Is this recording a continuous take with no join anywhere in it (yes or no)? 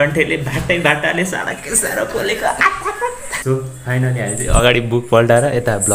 no